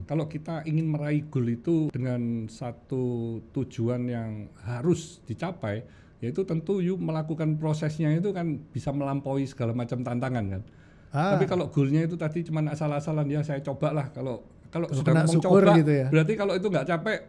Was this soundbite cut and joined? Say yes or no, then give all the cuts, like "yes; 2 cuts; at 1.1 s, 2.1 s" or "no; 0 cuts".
yes; 1 cut; at 1.9 s